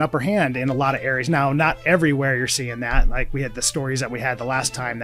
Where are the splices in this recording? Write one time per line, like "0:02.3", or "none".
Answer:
none